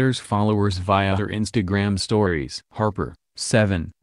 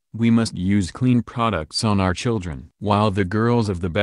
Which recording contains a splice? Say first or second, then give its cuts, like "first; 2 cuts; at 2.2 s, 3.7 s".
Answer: first; 1 cut; at 2.6 s